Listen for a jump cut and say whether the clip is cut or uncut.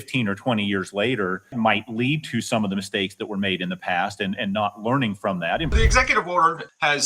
cut